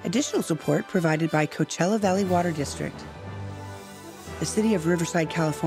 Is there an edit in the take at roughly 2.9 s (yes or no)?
yes